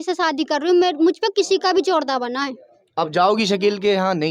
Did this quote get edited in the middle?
no; 0 cuts

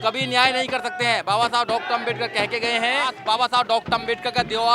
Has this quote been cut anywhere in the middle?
yes; 1 cut; at 3.1 s

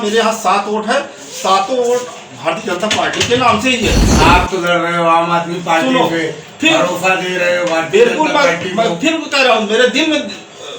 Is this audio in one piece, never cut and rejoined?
yes; 0 cuts

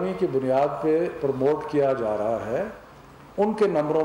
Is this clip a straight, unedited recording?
yes; 0 cuts

